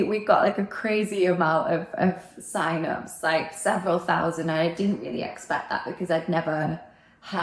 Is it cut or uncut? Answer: uncut